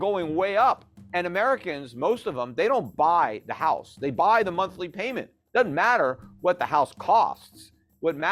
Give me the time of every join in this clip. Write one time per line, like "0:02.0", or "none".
0:00.9